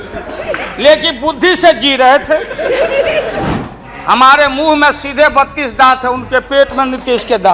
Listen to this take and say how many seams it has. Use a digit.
1